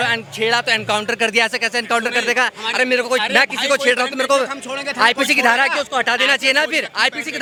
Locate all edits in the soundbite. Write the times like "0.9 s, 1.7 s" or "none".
none